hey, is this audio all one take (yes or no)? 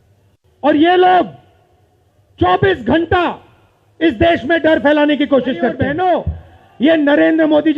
no